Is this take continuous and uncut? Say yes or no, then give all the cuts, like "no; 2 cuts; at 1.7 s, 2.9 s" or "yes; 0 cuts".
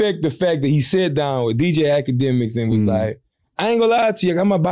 yes; 0 cuts